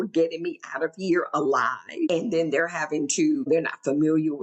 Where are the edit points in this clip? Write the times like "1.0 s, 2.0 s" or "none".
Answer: 2.1 s, 3.5 s